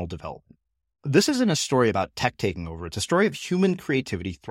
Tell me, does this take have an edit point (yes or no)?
no